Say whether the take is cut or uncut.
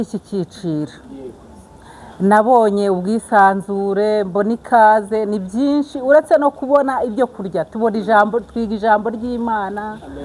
uncut